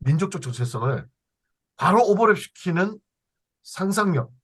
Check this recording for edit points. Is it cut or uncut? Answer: uncut